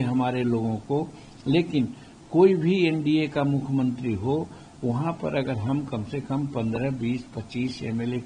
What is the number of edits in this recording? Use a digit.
0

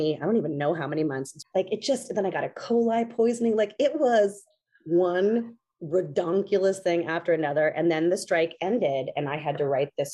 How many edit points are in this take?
1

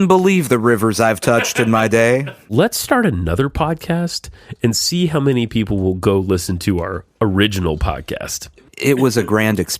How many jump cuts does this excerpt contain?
2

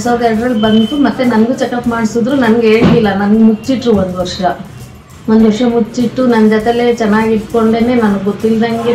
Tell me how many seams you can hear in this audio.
1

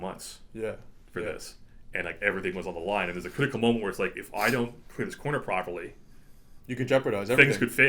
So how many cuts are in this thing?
0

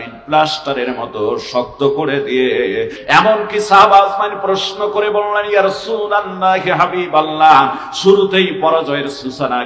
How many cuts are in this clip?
1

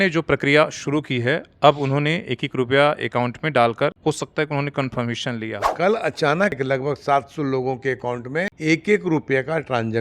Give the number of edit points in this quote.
4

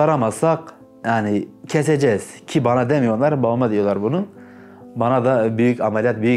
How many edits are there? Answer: 0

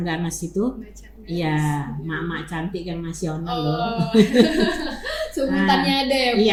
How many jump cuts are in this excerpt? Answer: 0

